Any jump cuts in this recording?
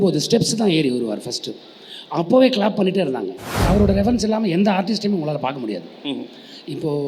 yes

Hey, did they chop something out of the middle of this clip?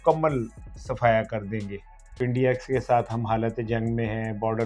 yes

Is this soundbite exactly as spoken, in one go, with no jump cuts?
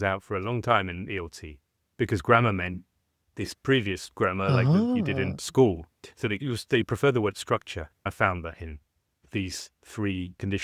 no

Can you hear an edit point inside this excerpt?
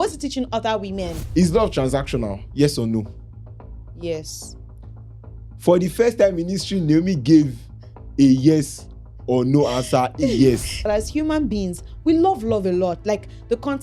yes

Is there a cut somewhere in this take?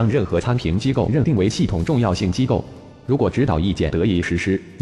yes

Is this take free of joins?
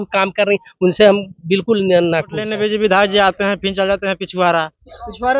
no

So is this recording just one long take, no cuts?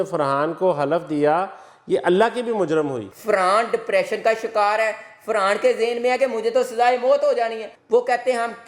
no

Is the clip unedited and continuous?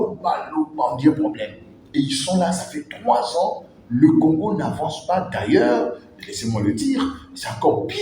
yes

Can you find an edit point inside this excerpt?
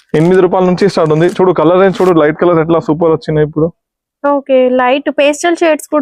no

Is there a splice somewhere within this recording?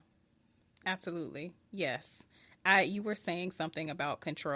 no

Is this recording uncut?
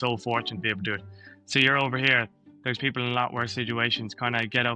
yes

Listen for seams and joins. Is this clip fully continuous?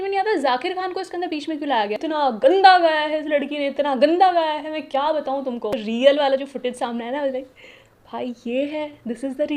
no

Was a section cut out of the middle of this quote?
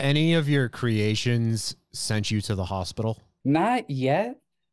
yes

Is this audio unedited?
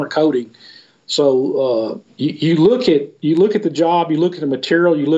no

